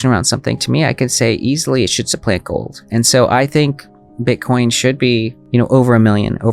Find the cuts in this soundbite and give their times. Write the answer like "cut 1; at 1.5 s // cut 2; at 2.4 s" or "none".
none

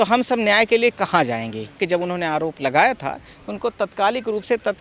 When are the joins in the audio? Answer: cut 1; at 1.8 s

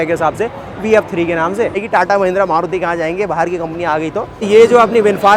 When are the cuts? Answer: cut 1; at 1.8 s // cut 2; at 4.5 s

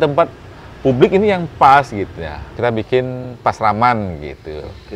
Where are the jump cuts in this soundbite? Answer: cut 1; at 2.5 s

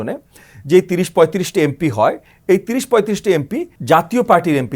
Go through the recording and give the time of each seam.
cut 1; at 3.7 s

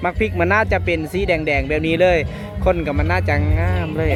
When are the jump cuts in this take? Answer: none

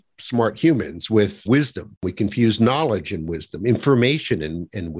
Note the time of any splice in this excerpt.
none

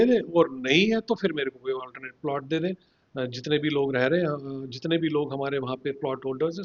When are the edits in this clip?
none

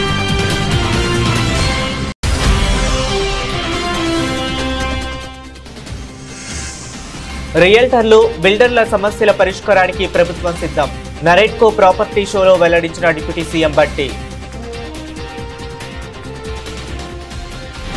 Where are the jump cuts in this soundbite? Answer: cut 1; at 2.2 s

